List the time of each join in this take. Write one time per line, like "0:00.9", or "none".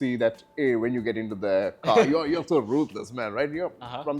none